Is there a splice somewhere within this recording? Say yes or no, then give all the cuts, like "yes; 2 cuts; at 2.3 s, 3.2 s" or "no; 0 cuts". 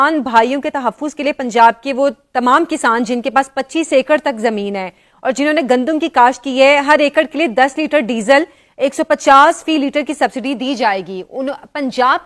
no; 0 cuts